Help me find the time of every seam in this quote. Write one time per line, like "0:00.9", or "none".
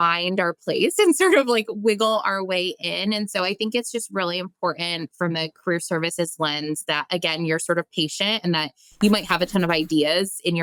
none